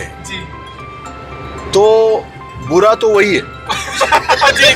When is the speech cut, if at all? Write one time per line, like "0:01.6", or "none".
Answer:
none